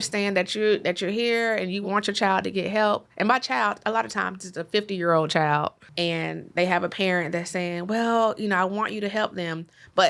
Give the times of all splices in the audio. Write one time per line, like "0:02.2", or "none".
0:01.8
0:05.8